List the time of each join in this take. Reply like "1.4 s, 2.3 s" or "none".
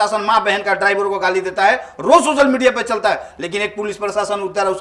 none